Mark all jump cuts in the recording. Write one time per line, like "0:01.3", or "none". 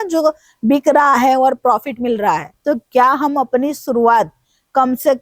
0:02.5